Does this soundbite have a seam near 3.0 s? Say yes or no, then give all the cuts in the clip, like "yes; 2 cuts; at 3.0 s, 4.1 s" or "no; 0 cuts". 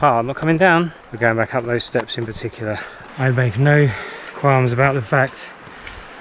yes; 2 cuts; at 1.0 s, 3.0 s